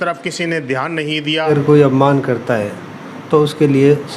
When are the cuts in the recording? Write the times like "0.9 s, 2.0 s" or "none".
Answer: 1.5 s